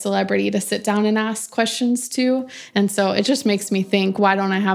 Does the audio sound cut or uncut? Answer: uncut